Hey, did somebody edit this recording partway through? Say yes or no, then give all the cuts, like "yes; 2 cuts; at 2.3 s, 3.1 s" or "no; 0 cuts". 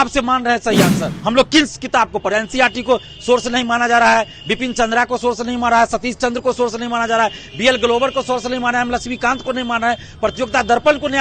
yes; 1 cut; at 1.1 s